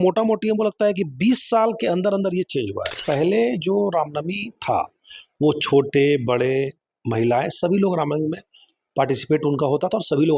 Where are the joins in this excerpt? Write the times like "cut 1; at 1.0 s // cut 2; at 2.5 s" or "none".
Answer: cut 1; at 3.0 s